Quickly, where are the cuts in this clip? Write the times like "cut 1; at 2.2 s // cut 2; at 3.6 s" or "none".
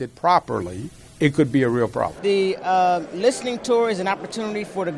cut 1; at 2.1 s